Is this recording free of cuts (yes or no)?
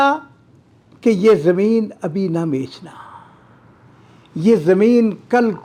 yes